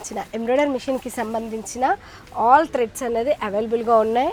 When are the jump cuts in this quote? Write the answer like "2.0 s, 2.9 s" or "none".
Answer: none

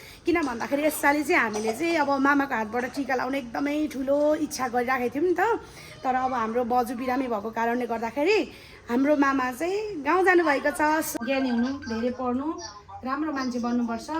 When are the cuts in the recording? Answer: 11.1 s

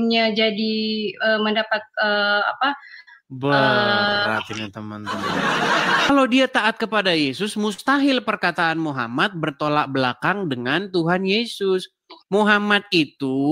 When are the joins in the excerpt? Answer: 6.1 s

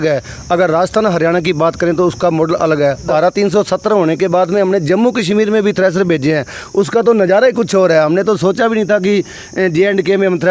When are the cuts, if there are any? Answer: 3.1 s

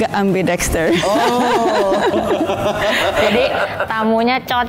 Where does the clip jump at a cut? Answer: none

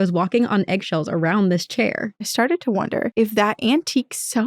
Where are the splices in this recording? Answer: 2.3 s, 3.1 s

